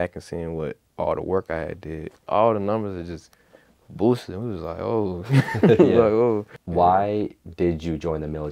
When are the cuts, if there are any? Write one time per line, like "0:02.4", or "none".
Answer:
0:02.2
0:06.6